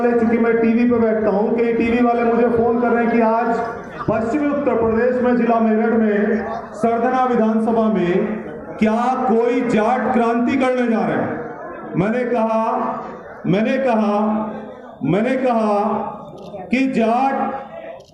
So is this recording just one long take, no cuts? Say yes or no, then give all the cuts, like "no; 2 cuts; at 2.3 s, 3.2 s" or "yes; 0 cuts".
yes; 0 cuts